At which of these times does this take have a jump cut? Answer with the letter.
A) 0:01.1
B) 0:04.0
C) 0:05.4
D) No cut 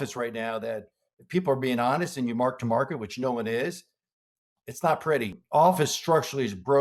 C